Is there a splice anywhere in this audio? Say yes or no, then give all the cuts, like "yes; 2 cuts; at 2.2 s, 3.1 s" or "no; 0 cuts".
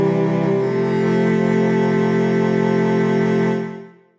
no; 0 cuts